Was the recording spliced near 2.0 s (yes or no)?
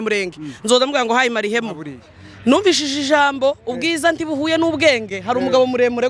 yes